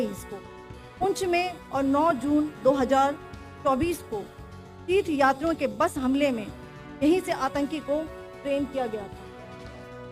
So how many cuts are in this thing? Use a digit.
1